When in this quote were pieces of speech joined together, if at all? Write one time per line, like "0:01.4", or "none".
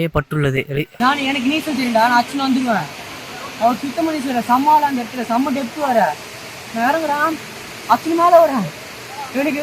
0:00.9